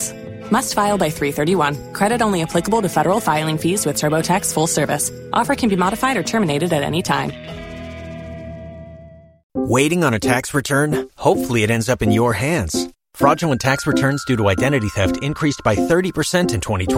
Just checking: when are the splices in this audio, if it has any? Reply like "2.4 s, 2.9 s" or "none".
9.5 s